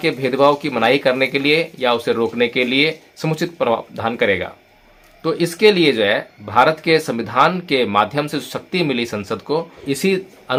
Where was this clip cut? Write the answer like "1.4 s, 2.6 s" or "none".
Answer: none